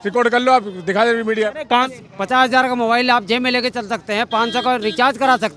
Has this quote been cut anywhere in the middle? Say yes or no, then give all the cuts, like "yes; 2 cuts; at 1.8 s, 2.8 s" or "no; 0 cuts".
yes; 1 cut; at 2.1 s